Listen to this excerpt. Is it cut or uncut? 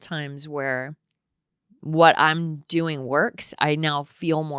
uncut